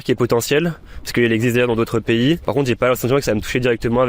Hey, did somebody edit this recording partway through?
no; 0 cuts

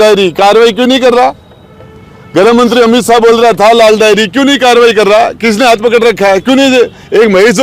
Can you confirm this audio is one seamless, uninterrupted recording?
yes; 0 cuts

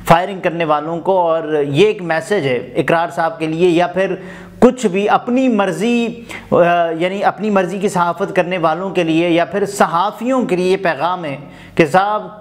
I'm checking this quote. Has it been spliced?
no; 0 cuts

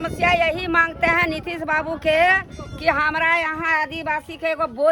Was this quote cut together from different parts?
no; 0 cuts

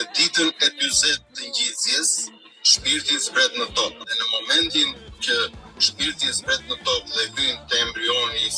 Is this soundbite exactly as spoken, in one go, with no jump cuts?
no; 1 cut; at 4.1 s

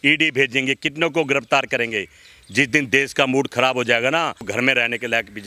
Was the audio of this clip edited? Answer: yes; 1 cut; at 4.4 s

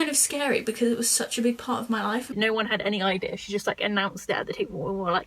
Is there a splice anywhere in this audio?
yes; 1 cut; at 2.3 s

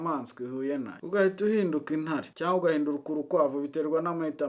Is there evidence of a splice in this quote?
yes; 2 cuts; at 1.0 s, 2.3 s

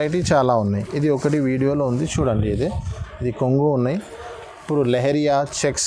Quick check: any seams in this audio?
no; 0 cuts

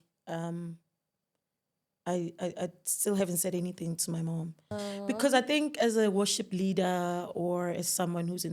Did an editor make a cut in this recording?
yes; 1 cut; at 4.7 s

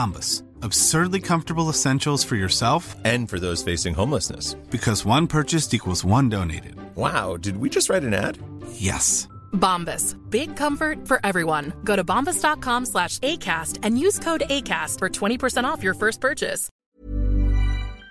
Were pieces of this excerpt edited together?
yes; 1 cut; at 16.7 s

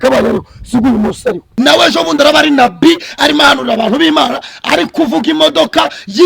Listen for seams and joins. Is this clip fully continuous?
no; 1 cut; at 1.4 s

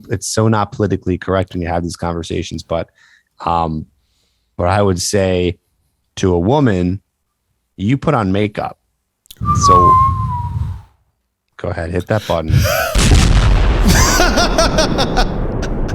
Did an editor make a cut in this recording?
no; 0 cuts

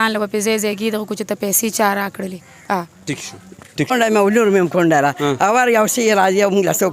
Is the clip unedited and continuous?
no; 1 cut; at 3.9 s

